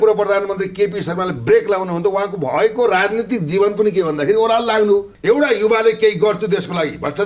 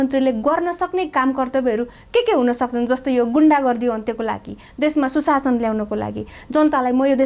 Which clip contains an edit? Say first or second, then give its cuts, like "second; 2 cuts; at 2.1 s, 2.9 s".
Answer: first; 1 cut; at 5.1 s